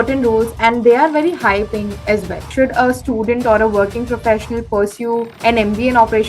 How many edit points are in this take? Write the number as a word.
two